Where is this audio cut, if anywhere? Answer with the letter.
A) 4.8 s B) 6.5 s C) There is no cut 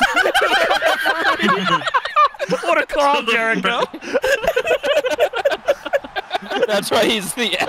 B